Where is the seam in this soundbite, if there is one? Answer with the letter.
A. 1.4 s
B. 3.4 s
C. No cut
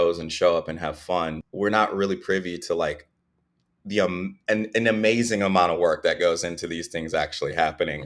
A